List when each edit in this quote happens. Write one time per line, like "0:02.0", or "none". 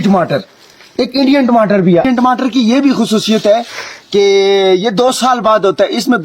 0:02.1

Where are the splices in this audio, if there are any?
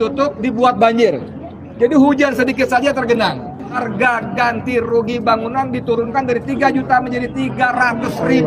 0:03.8

